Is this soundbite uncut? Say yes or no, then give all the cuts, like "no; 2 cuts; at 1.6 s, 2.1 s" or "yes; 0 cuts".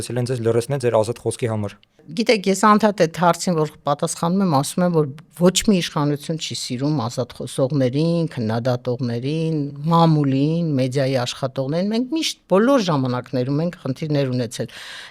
yes; 0 cuts